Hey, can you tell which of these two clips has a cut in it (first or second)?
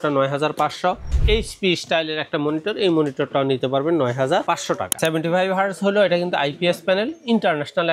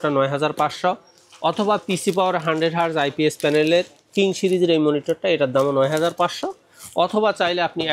first